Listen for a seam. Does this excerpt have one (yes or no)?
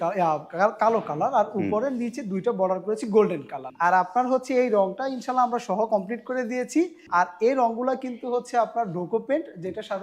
yes